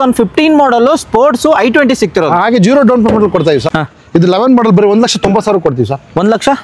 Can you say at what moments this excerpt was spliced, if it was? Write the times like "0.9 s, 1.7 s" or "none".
3.7 s